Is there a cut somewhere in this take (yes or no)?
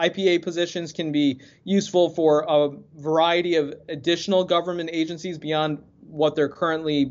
no